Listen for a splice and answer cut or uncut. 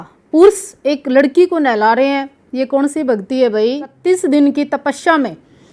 cut